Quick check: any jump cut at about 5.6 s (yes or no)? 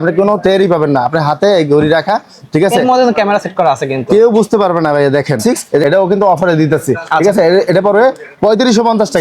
yes